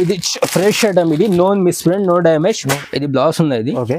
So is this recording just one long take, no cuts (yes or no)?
no